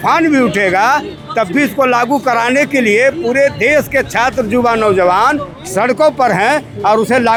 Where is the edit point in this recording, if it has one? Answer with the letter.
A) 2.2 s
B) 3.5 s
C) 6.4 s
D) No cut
D